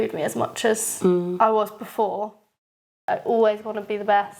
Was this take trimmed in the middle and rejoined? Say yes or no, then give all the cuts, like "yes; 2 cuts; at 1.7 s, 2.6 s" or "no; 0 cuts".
yes; 1 cut; at 2.6 s